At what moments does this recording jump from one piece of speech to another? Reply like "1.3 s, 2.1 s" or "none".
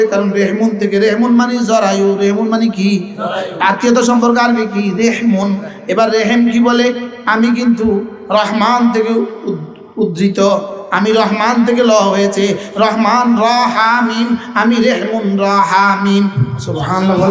none